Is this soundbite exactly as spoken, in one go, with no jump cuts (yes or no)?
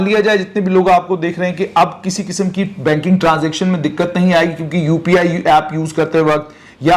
yes